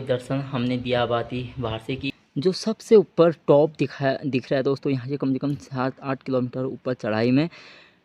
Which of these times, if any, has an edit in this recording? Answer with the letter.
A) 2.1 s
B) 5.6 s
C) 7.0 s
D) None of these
A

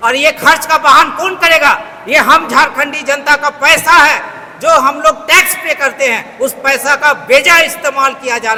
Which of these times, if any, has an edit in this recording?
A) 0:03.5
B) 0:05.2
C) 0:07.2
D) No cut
D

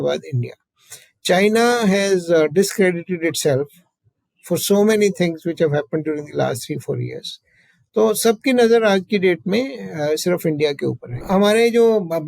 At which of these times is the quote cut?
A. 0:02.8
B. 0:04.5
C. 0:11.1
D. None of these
C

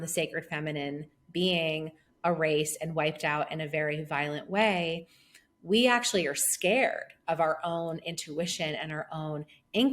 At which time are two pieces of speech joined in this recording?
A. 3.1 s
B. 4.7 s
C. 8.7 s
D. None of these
D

